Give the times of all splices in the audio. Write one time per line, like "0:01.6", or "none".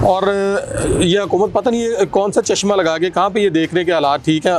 none